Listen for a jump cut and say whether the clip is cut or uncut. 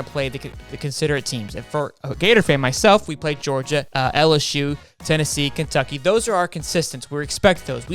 cut